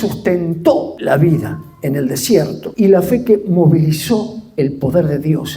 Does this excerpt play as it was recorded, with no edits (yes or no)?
no